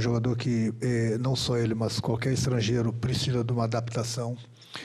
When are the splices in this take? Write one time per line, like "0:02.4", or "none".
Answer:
none